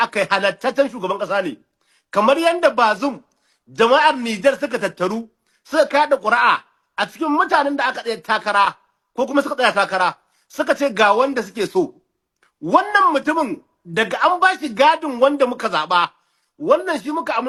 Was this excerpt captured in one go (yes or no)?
yes